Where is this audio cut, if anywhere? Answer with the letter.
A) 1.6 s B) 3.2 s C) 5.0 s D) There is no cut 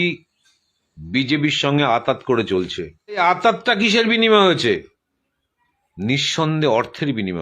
B